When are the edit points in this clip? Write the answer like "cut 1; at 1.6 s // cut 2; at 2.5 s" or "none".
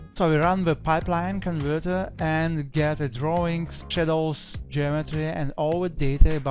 cut 1; at 3.8 s